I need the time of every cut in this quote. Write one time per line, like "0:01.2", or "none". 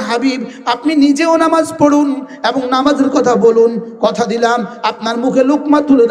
none